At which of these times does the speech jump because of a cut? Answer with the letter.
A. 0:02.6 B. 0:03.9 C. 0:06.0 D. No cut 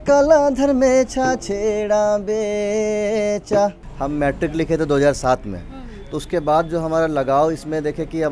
B